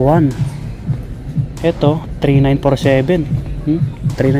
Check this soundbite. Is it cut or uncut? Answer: uncut